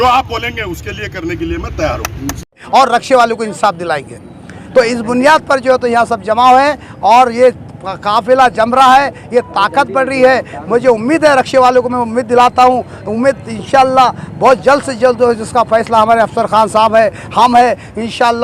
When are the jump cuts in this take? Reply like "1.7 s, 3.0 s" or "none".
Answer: 2.6 s